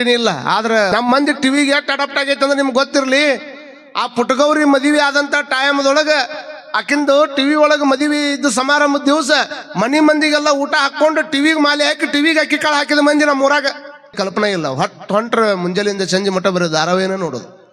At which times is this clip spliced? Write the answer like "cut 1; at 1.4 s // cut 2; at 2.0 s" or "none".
cut 1; at 0.9 s // cut 2; at 14.1 s